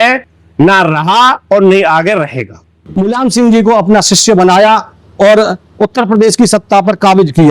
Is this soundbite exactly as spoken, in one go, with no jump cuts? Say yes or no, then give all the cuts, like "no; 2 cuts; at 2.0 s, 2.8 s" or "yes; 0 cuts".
no; 1 cut; at 2.9 s